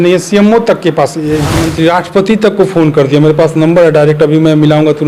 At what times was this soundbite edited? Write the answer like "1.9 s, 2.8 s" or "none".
1.6 s